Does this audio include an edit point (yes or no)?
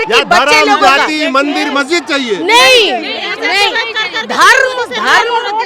no